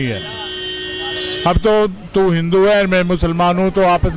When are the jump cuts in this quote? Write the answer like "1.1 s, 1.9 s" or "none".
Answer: none